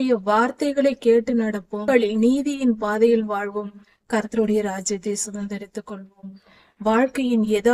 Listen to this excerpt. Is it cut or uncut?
cut